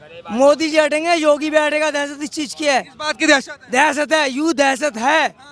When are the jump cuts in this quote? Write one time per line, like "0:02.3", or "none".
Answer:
none